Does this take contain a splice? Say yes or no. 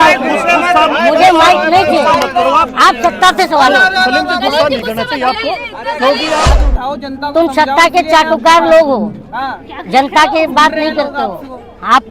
yes